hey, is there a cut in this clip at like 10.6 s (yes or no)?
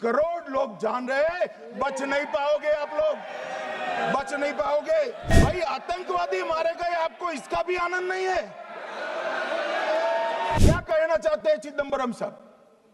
yes